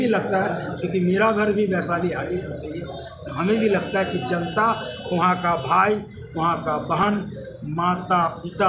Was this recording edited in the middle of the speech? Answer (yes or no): no